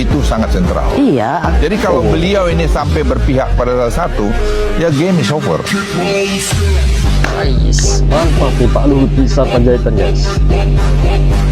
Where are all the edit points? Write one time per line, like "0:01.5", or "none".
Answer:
none